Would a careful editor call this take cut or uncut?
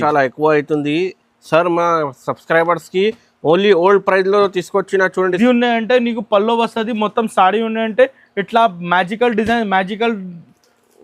cut